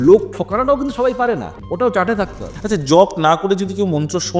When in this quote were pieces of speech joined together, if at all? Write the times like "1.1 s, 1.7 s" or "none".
1.5 s, 2.5 s